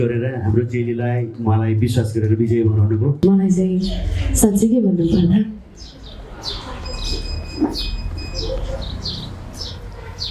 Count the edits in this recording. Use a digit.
1